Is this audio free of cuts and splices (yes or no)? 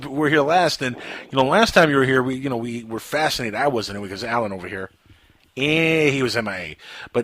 no